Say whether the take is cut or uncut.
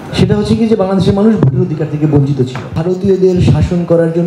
cut